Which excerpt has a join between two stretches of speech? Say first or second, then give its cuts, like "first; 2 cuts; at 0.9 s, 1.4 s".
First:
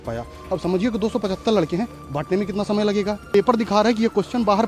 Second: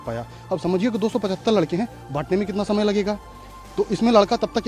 first; 1 cut; at 3.2 s